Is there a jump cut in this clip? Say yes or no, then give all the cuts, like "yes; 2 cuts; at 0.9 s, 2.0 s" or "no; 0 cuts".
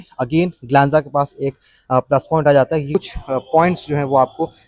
yes; 1 cut; at 2.9 s